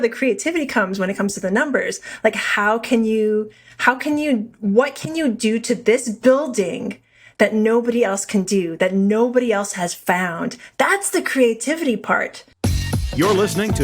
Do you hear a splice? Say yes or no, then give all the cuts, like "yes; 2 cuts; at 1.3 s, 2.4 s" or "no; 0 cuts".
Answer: yes; 1 cut; at 12.4 s